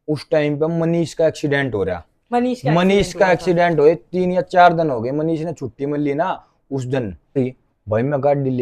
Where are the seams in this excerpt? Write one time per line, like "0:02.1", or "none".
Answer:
0:07.4